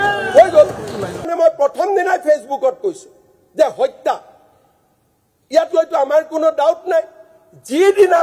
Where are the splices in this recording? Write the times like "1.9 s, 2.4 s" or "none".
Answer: 1.3 s